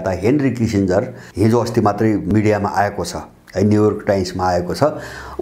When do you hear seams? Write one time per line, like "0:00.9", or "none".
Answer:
0:01.2
0:02.3